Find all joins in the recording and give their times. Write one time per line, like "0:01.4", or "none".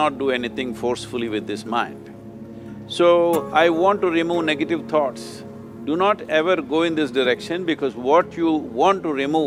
none